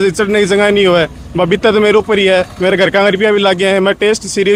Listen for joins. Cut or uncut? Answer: uncut